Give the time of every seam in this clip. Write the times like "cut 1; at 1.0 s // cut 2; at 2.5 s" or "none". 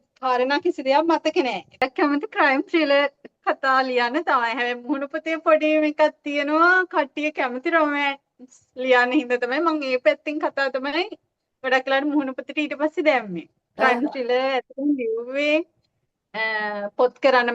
cut 1; at 1.8 s